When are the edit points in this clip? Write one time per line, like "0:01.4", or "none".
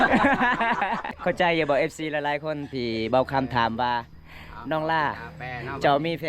0:01.2